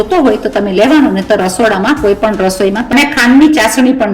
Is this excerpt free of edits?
no; 1 cut; at 2.9 s

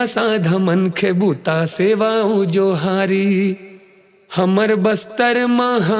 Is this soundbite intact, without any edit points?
yes; 0 cuts

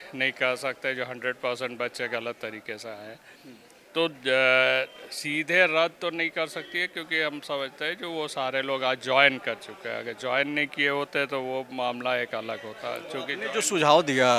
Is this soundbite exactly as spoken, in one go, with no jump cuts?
yes; 0 cuts

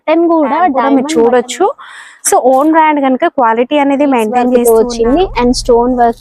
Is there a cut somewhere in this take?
yes; 2 cuts; at 0.8 s, 4.6 s

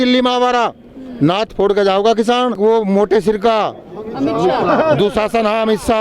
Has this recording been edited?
yes; 1 cut; at 2.6 s

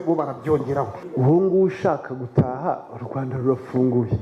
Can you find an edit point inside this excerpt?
yes; 1 cut; at 1.0 s

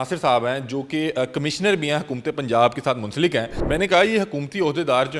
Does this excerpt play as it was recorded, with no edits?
no; 1 cut; at 3.6 s

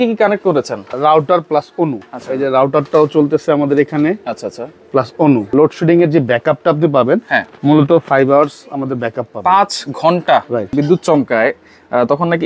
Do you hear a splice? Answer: yes; 3 cuts; at 0.9 s, 5.5 s, 10.7 s

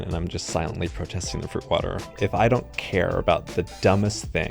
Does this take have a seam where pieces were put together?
yes; 1 cut; at 2.1 s

